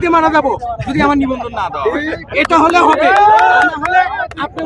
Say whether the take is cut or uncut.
uncut